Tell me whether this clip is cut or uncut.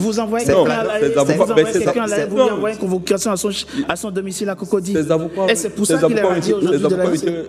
uncut